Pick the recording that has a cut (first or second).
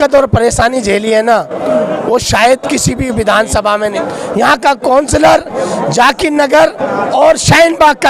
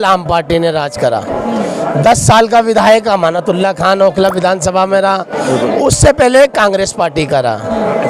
first